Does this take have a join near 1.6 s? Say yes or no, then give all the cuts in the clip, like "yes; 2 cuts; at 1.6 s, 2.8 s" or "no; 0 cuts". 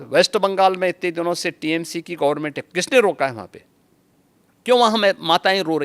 no; 0 cuts